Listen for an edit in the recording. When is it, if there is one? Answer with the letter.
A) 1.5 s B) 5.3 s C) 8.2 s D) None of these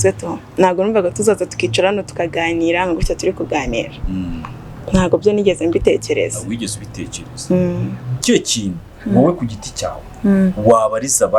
C